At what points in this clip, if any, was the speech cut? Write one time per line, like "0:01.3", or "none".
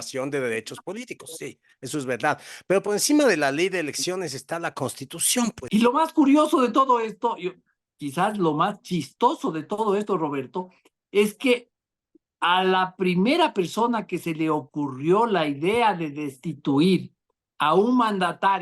0:05.6